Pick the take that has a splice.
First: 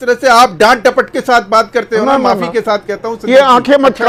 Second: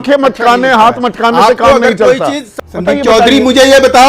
second; 1 cut; at 2.5 s

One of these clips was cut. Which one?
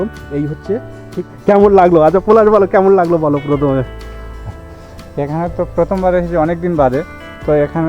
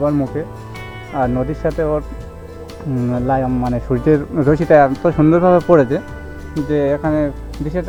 first; 1 cut; at 1.3 s

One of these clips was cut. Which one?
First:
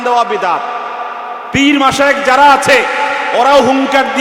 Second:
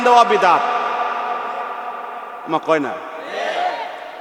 first; 1 cut; at 1.5 s

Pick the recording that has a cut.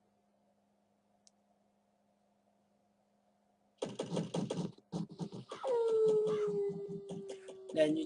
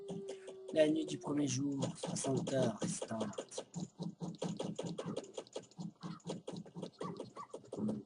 second; 1 cut; at 6.0 s

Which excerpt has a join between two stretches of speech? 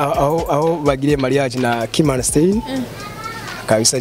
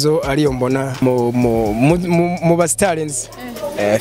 second; 1 cut; at 0.9 s

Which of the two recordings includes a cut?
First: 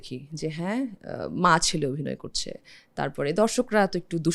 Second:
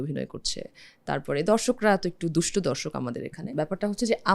second; 1 cut; at 3.4 s

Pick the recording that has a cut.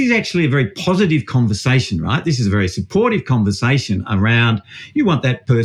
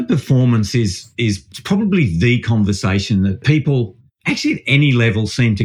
second; 2 cuts; at 1.5 s, 3.4 s

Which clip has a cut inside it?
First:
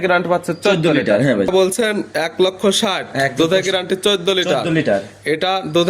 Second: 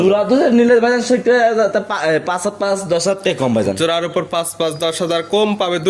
first; 1 cut; at 1.5 s

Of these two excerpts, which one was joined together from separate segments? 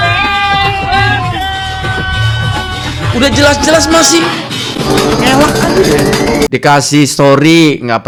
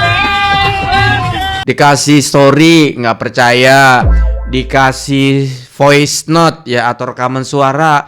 second; 1 cut; at 1.7 s

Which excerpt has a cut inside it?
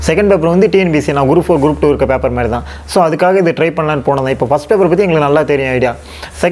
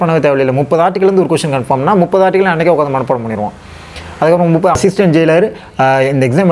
second; 1 cut; at 4.7 s

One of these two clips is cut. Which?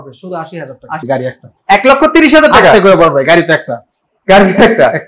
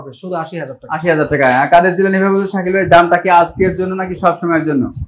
first; 1 cut; at 1.0 s

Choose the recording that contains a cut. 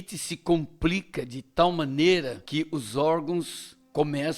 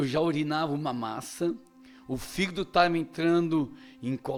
first; 1 cut; at 2.4 s

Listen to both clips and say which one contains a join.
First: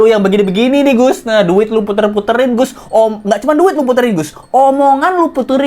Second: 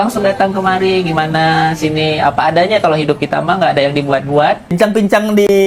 second; 1 cut; at 4.7 s

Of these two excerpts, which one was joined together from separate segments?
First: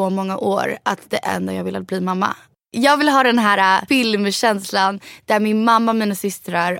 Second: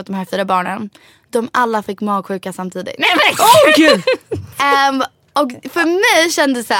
first; 2 cuts; at 2.6 s, 3.8 s

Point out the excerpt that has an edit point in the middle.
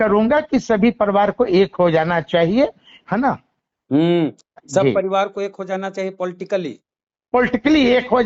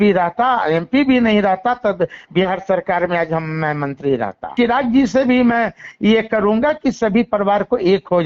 second; 1 cut; at 4.5 s

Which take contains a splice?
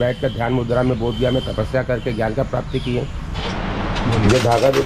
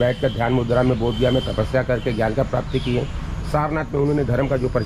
first; 1 cut; at 3.3 s

